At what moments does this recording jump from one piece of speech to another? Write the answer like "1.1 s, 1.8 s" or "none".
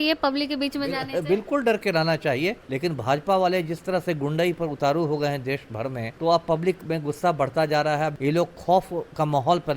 2.7 s, 6.1 s, 8.2 s